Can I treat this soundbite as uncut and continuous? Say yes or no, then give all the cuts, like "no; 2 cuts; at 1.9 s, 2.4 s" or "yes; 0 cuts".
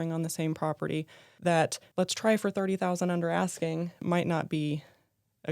no; 3 cuts; at 1.3 s, 1.8 s, 3.9 s